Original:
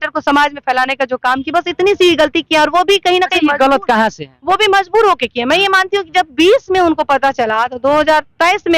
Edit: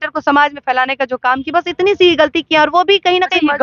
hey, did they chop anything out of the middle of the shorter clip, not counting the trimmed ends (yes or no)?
no